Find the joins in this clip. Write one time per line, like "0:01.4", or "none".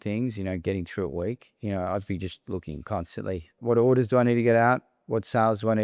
0:03.6